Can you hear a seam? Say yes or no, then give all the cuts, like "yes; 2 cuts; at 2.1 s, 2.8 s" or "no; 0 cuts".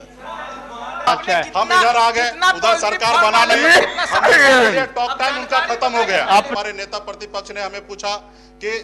yes; 2 cuts; at 1.1 s, 6.5 s